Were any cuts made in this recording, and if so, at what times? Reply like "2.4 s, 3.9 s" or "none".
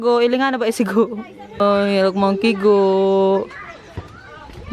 1.6 s